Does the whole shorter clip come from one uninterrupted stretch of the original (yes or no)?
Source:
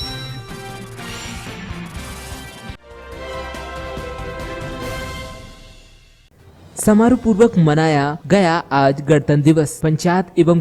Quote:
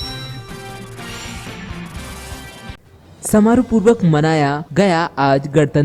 no